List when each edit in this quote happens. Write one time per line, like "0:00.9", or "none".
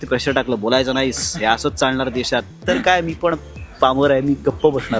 none